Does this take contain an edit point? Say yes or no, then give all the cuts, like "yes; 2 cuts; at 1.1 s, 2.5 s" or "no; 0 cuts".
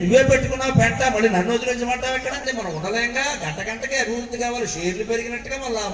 yes; 1 cut; at 2.4 s